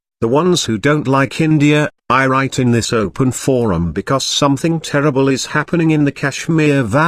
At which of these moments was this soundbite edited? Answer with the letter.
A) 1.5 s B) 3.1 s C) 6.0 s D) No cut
C